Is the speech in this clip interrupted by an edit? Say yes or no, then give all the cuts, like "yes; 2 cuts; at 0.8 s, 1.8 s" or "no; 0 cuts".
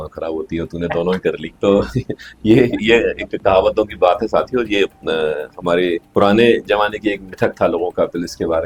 no; 0 cuts